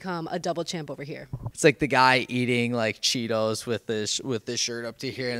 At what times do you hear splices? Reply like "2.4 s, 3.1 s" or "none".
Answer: 1.4 s